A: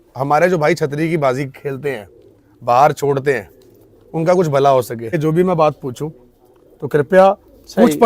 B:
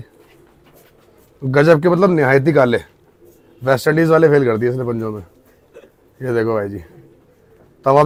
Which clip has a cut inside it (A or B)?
A